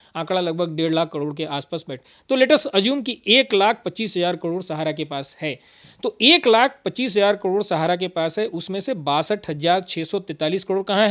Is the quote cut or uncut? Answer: uncut